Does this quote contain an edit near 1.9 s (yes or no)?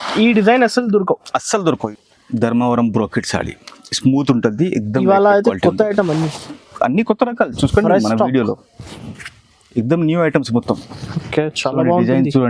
yes